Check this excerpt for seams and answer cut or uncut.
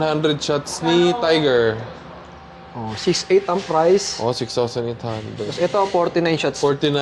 uncut